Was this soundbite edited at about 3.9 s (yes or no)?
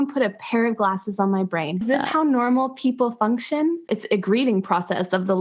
yes